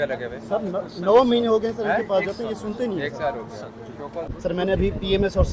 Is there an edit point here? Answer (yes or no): yes